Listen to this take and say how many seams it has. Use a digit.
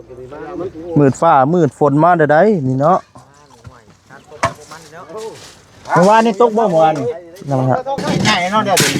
1